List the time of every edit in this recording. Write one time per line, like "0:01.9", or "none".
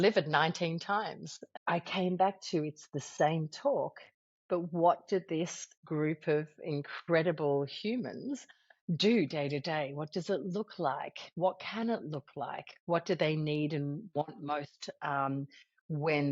0:01.5